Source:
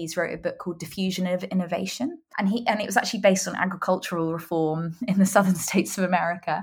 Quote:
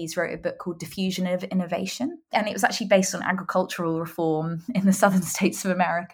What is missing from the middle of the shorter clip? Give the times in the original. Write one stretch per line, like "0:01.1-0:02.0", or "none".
0:02.3-0:02.6